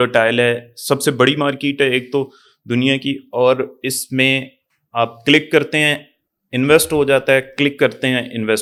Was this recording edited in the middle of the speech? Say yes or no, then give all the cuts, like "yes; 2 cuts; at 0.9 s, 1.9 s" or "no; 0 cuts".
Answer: no; 0 cuts